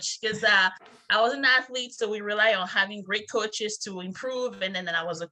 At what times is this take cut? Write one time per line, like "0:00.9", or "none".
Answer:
none